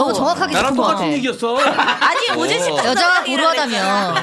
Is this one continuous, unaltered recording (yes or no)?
no